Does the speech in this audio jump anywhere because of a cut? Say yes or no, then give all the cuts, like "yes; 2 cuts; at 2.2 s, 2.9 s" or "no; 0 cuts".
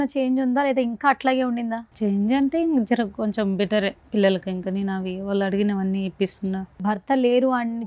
yes; 2 cuts; at 1.9 s, 6.8 s